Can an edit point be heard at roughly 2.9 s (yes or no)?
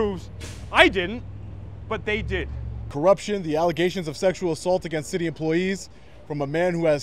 yes